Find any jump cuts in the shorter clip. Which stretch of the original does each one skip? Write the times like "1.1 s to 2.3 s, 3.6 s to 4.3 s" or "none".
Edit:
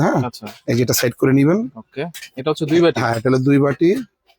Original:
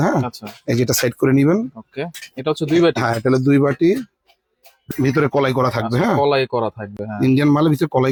none